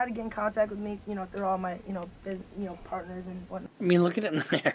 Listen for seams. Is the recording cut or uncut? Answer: cut